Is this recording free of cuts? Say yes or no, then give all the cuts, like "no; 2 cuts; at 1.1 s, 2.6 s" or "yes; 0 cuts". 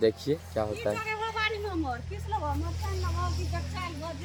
yes; 0 cuts